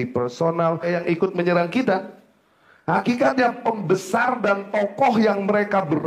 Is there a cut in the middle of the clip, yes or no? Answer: yes